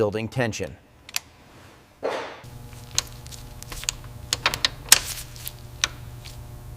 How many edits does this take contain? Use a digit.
1